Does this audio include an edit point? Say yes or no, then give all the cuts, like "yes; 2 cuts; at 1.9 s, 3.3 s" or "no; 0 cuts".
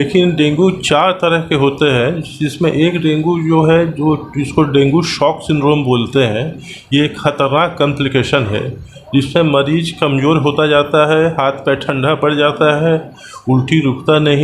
no; 0 cuts